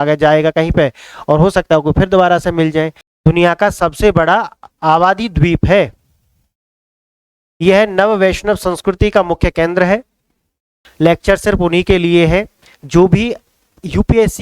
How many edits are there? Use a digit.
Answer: 2